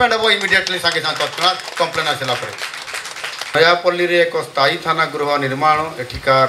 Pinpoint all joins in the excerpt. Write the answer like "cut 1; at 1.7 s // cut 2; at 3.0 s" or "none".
cut 1; at 3.5 s